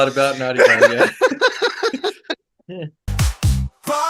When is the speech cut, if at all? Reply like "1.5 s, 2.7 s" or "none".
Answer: 3.1 s